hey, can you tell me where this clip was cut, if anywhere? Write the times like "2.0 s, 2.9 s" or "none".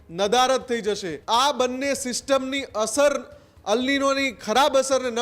1.1 s